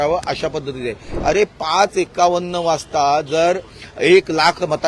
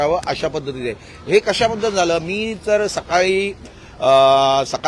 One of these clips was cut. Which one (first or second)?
first